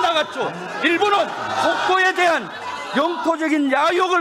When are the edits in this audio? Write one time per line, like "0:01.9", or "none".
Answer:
none